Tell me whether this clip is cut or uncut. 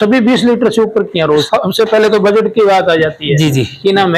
cut